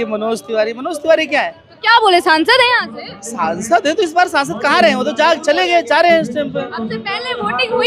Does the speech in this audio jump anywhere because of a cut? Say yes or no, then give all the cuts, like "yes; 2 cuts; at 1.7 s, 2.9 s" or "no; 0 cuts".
no; 0 cuts